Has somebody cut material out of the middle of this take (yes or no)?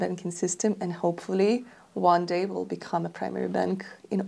no